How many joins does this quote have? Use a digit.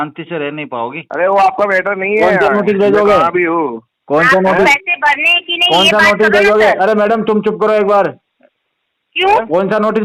1